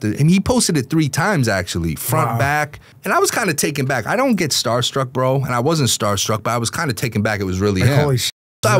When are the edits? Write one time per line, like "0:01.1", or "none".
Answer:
0:02.9

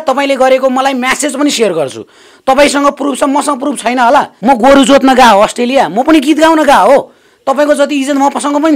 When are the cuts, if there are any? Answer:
0:04.3

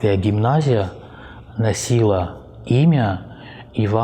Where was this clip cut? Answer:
none

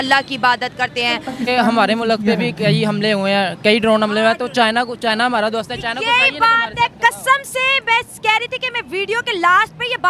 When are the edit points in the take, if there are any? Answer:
0:01.4

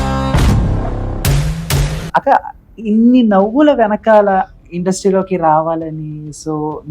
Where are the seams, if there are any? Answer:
0:02.1

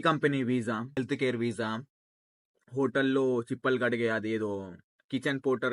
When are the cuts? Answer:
0:00.9

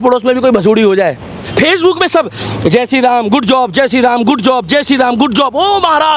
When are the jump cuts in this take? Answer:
0:01.4

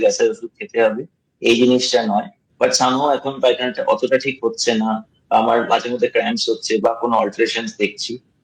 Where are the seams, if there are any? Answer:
0:02.4

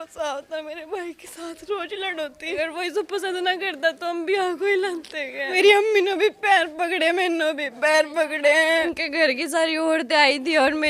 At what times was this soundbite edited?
0:02.6
0:05.5
0:08.9

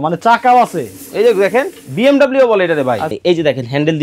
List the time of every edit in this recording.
0:03.1

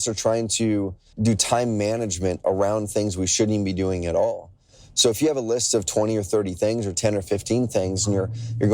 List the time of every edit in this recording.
0:01.1

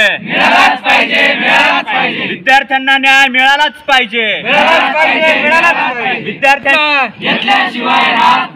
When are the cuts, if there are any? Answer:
0:06.9

